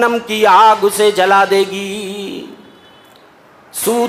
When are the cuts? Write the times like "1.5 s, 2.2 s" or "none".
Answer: none